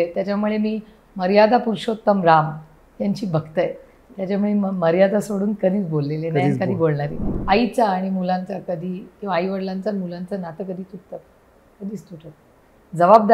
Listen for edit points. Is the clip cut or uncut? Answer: cut